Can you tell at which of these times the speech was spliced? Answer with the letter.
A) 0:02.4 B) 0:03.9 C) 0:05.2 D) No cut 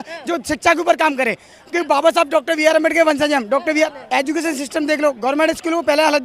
B